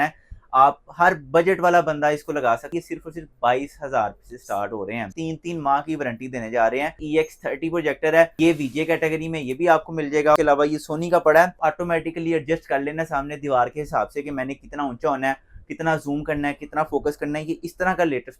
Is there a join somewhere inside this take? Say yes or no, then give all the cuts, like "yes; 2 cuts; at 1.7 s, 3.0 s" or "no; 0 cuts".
yes; 6 cuts; at 2.7 s, 5.1 s, 7.0 s, 8.3 s, 10.4 s, 11.6 s